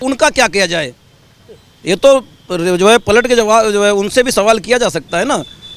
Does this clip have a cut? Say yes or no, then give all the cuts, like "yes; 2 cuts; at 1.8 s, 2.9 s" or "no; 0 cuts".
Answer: no; 0 cuts